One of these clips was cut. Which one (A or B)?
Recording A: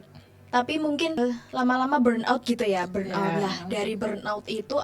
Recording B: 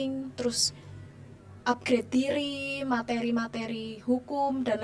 A